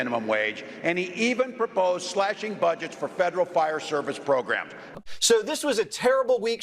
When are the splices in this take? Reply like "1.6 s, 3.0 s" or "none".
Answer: 4.8 s